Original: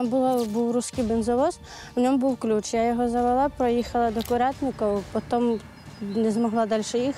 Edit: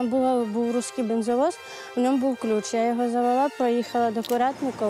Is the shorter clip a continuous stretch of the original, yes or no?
yes